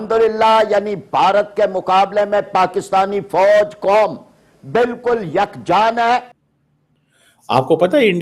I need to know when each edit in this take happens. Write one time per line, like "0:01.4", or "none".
0:06.5